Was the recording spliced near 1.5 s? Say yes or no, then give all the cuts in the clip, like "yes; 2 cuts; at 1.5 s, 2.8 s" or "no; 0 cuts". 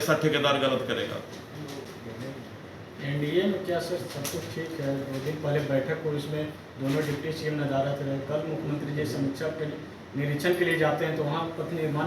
no; 0 cuts